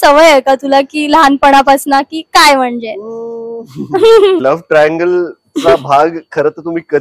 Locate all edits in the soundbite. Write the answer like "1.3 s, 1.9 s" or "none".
4.4 s